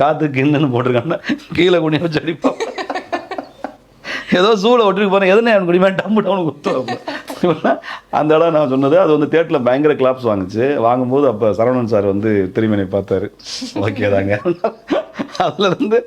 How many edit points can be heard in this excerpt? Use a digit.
0